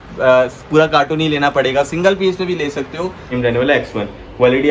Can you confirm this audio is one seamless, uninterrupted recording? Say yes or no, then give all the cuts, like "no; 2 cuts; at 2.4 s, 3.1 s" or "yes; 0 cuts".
no; 1 cut; at 3.4 s